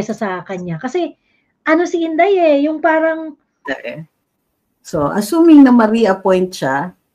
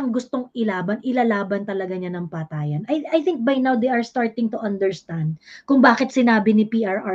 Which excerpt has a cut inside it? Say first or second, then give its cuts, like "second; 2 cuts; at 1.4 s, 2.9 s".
first; 1 cut; at 3.6 s